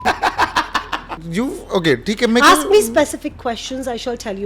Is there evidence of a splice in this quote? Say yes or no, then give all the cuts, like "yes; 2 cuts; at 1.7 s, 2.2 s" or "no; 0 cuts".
yes; 1 cut; at 1.2 s